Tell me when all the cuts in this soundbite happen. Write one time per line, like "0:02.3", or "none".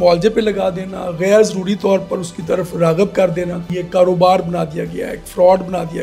0:03.7